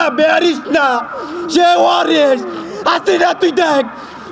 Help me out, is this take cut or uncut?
uncut